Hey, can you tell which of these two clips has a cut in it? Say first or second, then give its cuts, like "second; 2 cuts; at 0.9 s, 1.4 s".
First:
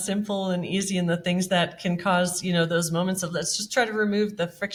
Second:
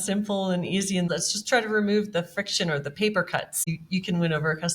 second; 2 cuts; at 1.1 s, 3.7 s